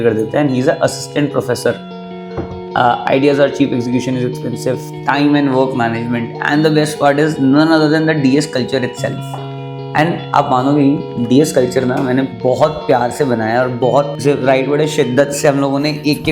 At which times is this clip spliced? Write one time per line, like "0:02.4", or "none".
0:12.3